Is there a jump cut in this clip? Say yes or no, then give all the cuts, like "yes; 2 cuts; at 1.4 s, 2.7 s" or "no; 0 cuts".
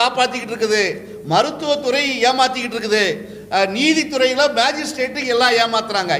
no; 0 cuts